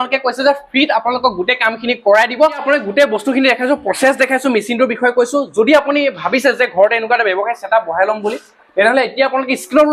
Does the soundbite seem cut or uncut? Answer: uncut